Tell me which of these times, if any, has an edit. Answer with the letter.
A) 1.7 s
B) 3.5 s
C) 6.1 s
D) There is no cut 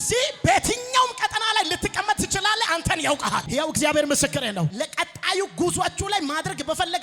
B